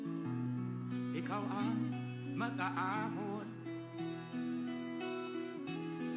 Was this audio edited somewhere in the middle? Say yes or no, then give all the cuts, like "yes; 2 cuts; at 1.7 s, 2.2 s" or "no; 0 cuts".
yes; 1 cut; at 3.6 s